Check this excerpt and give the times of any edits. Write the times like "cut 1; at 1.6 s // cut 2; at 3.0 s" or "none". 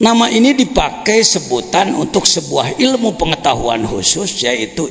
none